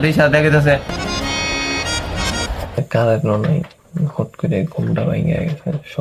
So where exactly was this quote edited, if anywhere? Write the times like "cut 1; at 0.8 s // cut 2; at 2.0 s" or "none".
cut 1; at 2.8 s